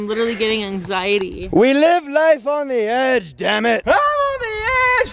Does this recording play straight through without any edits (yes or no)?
yes